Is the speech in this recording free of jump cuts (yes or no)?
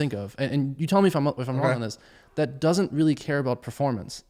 yes